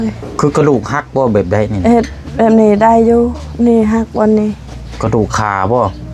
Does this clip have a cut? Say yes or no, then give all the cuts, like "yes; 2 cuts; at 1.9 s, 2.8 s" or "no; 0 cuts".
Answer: no; 0 cuts